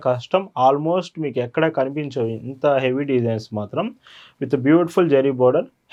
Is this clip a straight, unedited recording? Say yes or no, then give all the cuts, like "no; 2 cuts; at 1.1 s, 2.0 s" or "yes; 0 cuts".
yes; 0 cuts